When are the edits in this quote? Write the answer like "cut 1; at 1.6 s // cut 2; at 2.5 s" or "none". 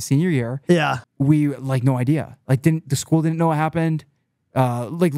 cut 1; at 1.0 s